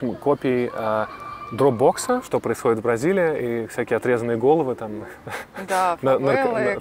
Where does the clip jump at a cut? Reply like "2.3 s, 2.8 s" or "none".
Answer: 2.2 s